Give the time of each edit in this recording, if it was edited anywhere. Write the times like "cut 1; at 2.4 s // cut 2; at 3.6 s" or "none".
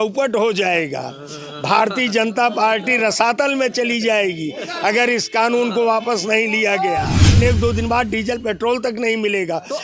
cut 1; at 7.4 s